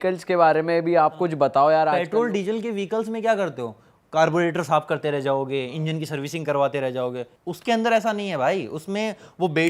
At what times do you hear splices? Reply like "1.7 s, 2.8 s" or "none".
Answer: 2.0 s, 7.3 s